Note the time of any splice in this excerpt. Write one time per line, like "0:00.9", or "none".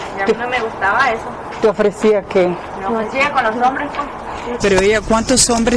0:04.4